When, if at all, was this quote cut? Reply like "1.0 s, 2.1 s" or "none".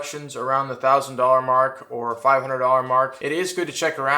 3.2 s